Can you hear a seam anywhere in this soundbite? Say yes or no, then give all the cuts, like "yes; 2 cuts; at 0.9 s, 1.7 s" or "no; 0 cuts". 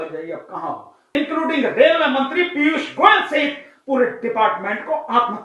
yes; 1 cut; at 1.2 s